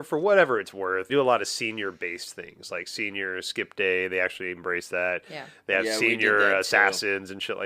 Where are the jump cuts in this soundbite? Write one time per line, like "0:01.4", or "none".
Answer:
0:01.1